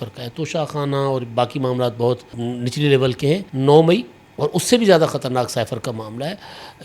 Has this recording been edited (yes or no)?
yes